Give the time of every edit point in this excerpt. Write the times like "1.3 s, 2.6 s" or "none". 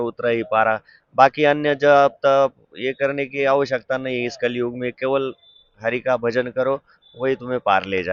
none